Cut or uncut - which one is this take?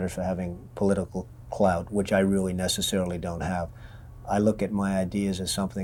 uncut